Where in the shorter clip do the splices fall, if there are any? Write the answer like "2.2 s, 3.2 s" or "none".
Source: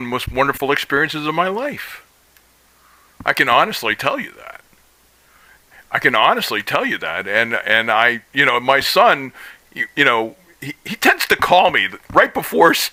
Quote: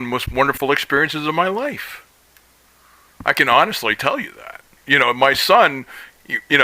4.8 s